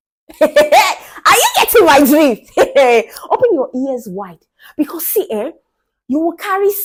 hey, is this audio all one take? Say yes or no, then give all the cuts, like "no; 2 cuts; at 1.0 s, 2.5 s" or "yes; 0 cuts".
yes; 0 cuts